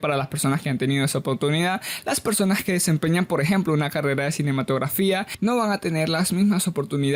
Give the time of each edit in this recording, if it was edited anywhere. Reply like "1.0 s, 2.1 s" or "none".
none